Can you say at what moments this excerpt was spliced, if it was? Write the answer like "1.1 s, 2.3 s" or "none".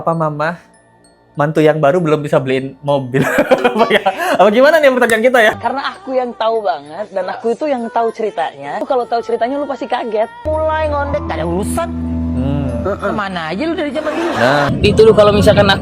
5.6 s, 8.8 s, 10.4 s, 14.7 s